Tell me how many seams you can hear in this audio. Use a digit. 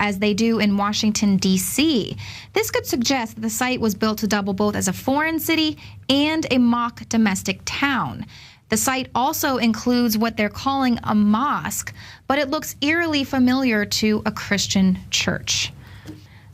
1